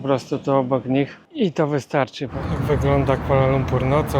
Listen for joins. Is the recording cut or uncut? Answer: cut